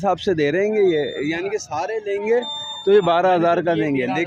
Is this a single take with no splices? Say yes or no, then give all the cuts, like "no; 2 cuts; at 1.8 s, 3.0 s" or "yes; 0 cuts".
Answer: yes; 0 cuts